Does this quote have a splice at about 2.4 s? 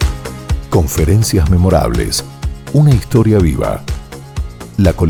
no; 0 cuts

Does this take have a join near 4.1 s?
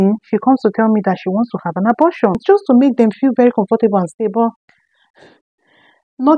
no; 1 cut; at 2.4 s

